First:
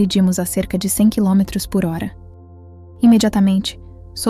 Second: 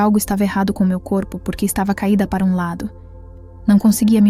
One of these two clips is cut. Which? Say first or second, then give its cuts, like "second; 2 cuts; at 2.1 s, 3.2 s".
second; 1 cut; at 3.3 s